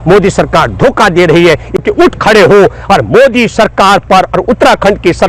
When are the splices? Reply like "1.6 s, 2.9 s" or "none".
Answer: 1.8 s